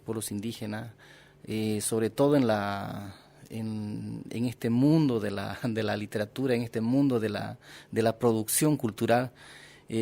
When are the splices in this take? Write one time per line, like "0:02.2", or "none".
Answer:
none